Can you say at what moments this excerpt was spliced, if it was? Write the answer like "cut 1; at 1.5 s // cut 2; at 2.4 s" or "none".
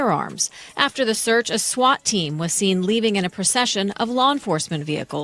cut 1; at 2.8 s

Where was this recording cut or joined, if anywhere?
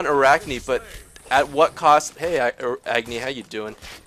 cut 1; at 2.1 s

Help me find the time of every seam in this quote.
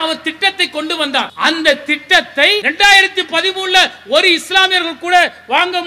cut 1; at 1.3 s // cut 2; at 2.7 s

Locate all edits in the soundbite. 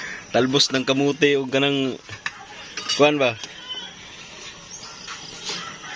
none

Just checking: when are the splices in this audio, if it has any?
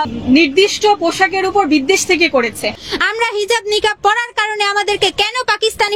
cut 1; at 2.8 s

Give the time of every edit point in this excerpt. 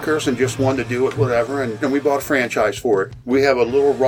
cut 1; at 1.8 s // cut 2; at 3.1 s

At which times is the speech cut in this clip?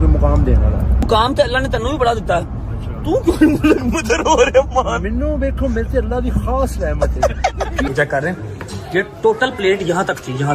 cut 1; at 1.1 s // cut 2; at 7.9 s

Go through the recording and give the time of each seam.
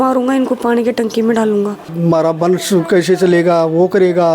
cut 1; at 1.9 s

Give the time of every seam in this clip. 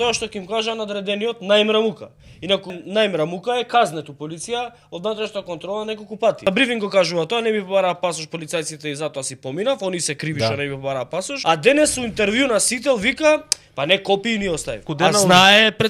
cut 1; at 2.7 s // cut 2; at 6.4 s // cut 3; at 11.3 s // cut 4; at 14.8 s

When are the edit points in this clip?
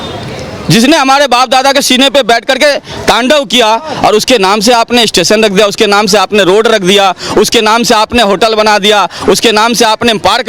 none

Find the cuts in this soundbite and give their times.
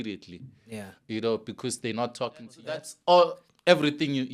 cut 1; at 2.9 s

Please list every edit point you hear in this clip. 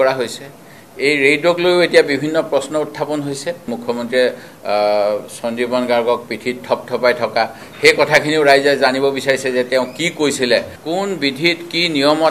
cut 1; at 3.8 s // cut 2; at 10.8 s

